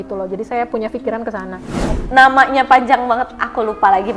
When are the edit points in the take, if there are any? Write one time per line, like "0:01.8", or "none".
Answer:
0:01.9